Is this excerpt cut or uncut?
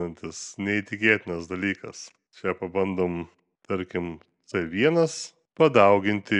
uncut